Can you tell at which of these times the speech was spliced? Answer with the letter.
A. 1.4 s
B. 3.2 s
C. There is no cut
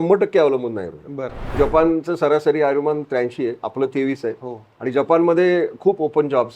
A